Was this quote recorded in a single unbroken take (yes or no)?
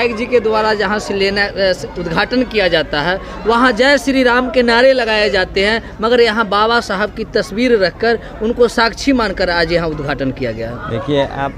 yes